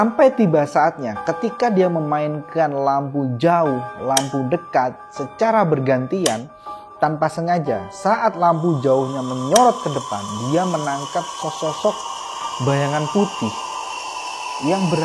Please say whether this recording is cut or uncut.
uncut